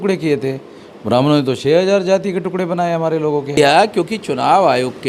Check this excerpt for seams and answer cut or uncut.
cut